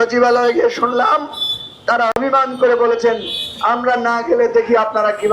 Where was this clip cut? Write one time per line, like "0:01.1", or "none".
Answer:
none